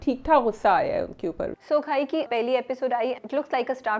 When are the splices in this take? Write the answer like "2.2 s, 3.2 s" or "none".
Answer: 1.6 s, 2.3 s, 3.2 s